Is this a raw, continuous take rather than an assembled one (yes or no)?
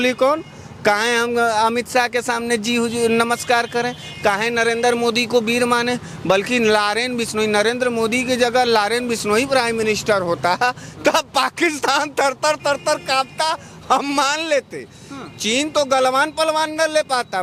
yes